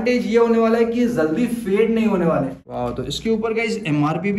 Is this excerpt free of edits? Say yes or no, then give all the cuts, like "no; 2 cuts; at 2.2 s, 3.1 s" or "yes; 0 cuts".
no; 1 cut; at 2.6 s